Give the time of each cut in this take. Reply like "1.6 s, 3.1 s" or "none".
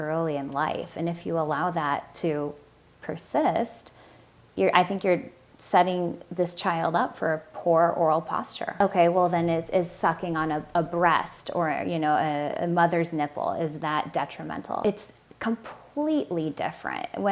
8.8 s, 14.8 s